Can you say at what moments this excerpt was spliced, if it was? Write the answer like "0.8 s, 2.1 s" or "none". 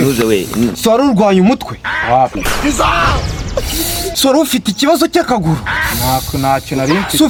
none